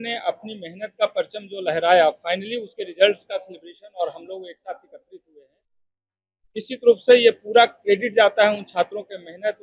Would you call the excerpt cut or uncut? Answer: uncut